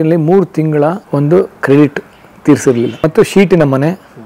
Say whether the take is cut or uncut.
cut